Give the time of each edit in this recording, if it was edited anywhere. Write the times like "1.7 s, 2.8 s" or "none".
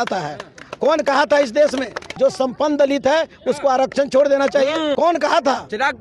2.1 s, 4.9 s